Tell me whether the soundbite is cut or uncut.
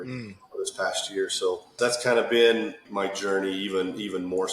cut